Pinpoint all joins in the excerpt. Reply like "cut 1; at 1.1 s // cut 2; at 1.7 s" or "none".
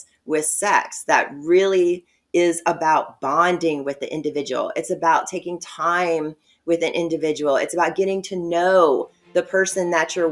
none